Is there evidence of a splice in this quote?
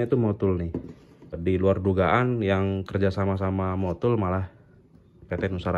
yes; 1 cut; at 1.3 s

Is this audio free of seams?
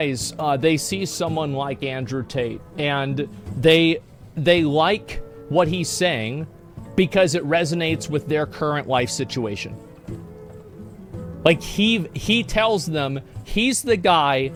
yes; 0 cuts

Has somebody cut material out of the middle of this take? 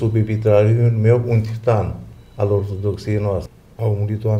yes; 1 cut; at 3.5 s

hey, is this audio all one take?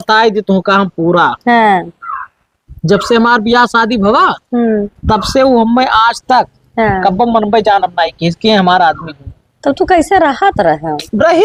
yes; 0 cuts

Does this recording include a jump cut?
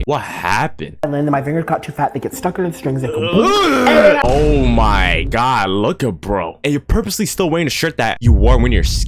yes; 2 cuts; at 1.0 s, 4.2 s

